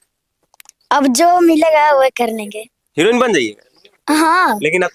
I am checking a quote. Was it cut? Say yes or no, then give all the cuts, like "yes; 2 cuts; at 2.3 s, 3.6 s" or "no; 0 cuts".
no; 0 cuts